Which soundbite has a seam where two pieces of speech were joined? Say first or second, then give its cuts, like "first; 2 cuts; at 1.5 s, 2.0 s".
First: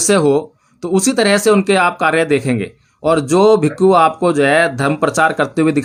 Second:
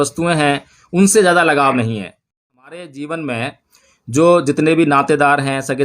second; 1 cut; at 2.5 s